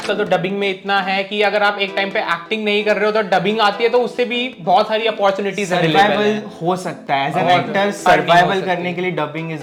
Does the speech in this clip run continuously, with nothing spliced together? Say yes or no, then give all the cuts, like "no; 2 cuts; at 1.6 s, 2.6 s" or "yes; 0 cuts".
yes; 0 cuts